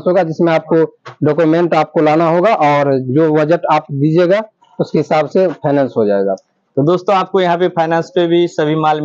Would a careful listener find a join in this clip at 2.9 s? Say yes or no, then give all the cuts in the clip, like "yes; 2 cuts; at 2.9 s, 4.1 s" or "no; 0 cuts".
no; 0 cuts